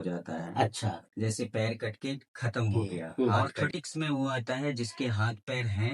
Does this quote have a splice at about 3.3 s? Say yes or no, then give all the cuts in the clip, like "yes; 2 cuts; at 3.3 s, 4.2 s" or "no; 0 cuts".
yes; 1 cut; at 3.3 s